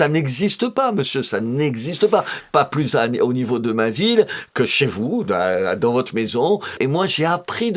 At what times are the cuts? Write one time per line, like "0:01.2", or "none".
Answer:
0:06.8